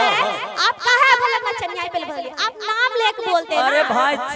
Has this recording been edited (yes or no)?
no